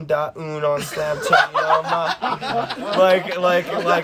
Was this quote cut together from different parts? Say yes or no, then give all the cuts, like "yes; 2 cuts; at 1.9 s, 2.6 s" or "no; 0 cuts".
no; 0 cuts